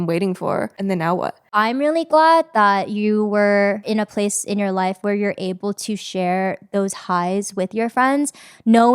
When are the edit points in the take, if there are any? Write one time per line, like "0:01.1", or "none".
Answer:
0:01.2
0:03.9